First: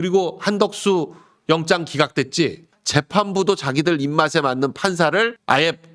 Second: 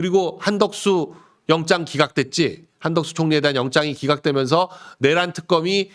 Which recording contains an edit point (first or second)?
first